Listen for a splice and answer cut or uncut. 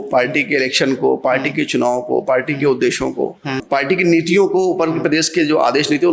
cut